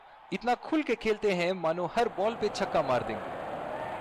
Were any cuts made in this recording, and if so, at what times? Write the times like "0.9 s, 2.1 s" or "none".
3.1 s